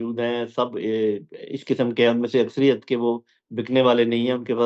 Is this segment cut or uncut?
uncut